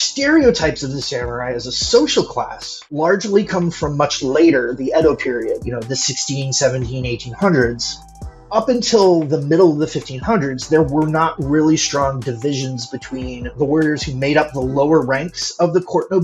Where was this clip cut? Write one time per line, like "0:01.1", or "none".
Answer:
none